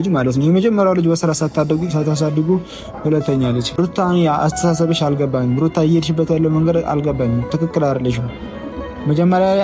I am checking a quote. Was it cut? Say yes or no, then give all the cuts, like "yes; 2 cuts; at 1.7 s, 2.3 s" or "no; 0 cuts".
no; 0 cuts